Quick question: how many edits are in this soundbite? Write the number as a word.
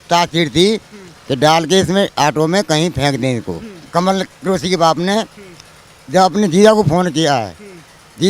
one